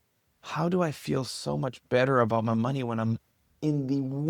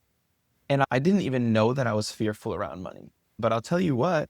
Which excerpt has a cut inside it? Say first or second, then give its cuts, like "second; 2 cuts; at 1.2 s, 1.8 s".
second; 2 cuts; at 0.9 s, 3.3 s